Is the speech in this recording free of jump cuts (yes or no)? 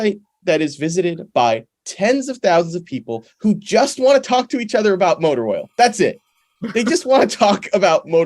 yes